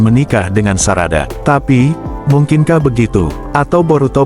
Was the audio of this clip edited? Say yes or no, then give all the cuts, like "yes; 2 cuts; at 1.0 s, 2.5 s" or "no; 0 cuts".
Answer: yes; 1 cut; at 1.3 s